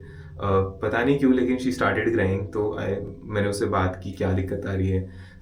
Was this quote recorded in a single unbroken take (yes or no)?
yes